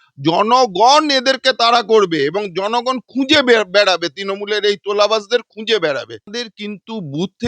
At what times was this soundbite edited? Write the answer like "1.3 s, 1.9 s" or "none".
6.5 s